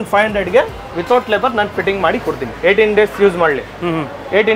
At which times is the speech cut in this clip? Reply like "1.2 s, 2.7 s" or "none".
2.5 s